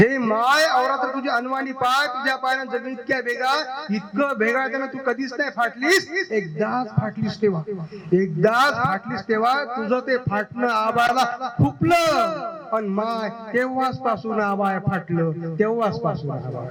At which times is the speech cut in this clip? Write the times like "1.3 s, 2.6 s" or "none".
none